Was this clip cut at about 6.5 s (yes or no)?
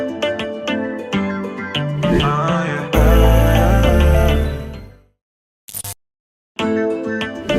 yes